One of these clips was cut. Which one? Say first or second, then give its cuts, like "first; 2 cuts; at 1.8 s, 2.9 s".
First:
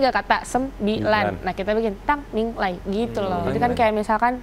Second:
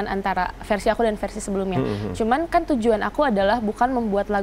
first; 1 cut; at 3.4 s